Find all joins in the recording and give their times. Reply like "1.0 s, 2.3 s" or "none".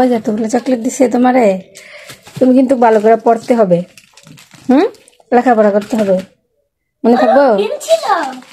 none